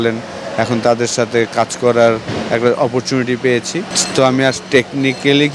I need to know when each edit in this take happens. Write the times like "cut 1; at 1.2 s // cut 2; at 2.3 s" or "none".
cut 1; at 3.9 s